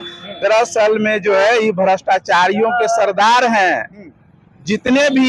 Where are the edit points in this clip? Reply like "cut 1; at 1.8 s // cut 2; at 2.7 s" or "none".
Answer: none